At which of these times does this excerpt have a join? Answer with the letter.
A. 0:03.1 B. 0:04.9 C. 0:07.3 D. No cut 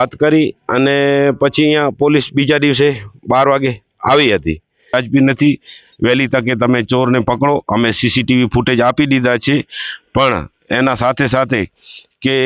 B